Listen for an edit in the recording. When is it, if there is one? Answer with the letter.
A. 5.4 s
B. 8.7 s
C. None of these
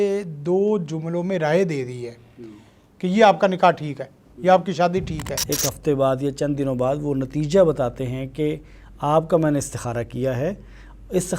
A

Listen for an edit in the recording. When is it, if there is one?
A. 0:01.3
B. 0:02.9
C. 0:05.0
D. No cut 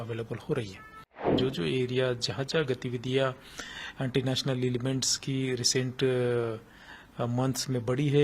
A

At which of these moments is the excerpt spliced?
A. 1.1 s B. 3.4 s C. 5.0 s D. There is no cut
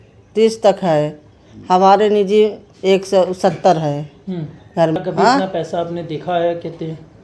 C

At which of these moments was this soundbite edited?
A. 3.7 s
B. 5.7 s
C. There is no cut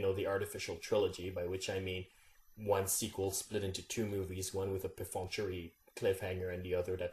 A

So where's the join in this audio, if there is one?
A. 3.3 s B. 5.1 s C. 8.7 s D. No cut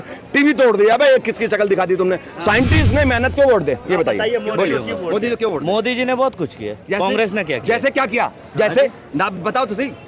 A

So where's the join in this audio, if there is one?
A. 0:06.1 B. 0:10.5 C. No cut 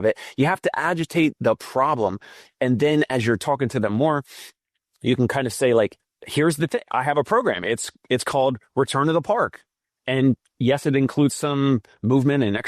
B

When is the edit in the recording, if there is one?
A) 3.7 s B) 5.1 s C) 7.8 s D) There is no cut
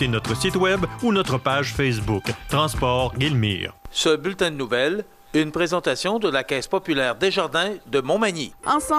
A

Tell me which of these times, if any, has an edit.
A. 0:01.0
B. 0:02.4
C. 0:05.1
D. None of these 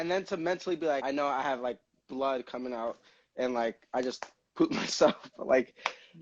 A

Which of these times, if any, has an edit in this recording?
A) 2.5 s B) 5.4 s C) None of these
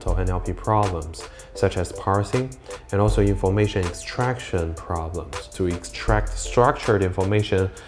B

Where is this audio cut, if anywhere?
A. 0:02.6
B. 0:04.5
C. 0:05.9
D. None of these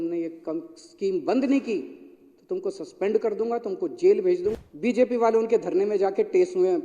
B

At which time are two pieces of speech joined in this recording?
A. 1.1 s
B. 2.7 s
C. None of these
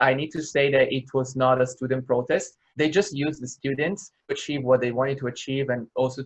B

